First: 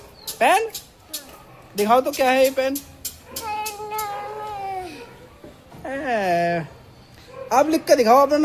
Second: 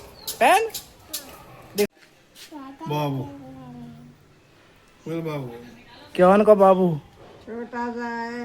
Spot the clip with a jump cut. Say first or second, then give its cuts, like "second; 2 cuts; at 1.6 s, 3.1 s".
second; 1 cut; at 1.9 s